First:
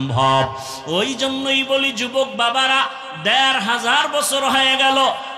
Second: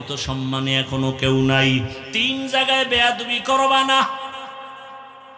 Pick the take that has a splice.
second; 1 cut; at 2.0 s

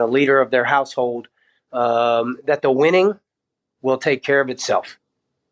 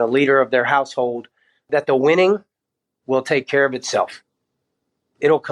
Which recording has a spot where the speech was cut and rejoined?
second; 1 cut; at 1.6 s

